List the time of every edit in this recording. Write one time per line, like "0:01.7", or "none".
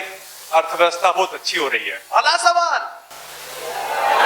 none